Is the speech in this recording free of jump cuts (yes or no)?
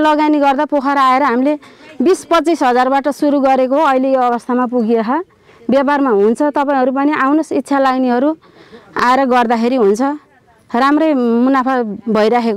yes